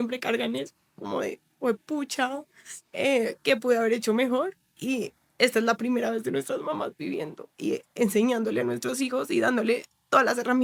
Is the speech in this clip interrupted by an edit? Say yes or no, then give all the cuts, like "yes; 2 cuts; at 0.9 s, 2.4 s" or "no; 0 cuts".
no; 0 cuts